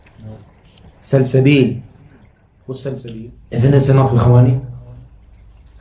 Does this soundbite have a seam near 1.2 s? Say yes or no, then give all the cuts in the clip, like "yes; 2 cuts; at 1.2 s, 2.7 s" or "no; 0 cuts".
no; 1 cut; at 3.2 s